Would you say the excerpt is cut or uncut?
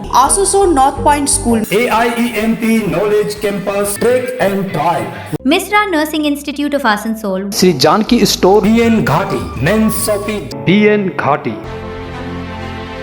cut